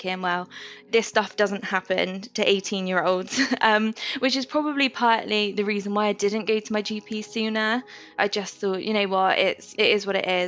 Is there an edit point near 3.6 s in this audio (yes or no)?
no